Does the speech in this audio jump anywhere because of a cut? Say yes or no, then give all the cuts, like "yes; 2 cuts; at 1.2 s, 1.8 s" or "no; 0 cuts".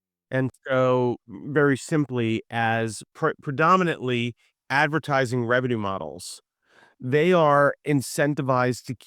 yes; 1 cut; at 3.1 s